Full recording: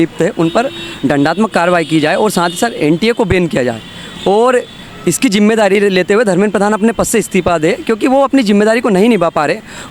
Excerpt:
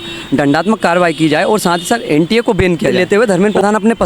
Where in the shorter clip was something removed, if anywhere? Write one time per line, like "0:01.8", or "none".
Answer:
0:02.9